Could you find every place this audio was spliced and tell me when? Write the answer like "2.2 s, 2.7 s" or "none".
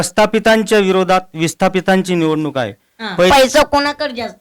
3.3 s

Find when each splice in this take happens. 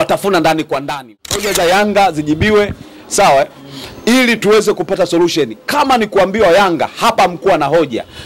1.1 s

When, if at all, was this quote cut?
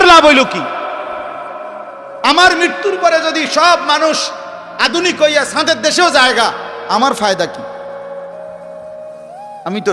none

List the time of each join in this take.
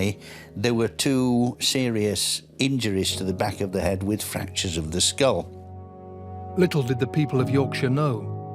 none

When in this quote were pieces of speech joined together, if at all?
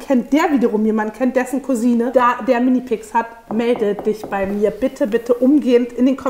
none

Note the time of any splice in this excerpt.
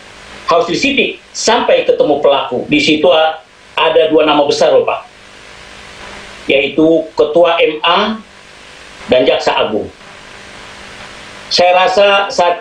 2.7 s

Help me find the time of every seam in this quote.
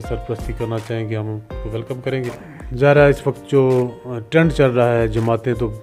none

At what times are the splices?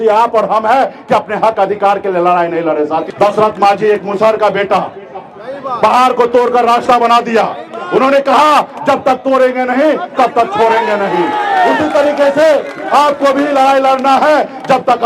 3.1 s

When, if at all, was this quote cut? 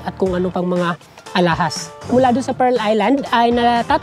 2.0 s

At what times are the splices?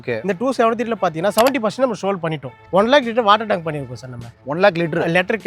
2.6 s

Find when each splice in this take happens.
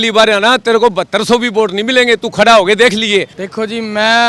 3.4 s

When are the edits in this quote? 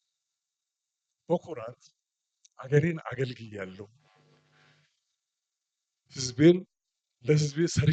none

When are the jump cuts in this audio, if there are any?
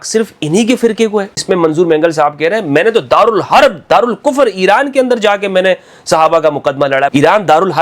1.3 s, 7.1 s

